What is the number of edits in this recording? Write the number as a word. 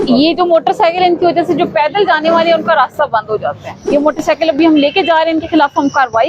one